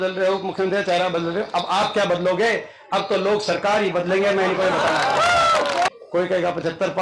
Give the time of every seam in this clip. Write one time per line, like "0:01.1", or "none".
0:05.9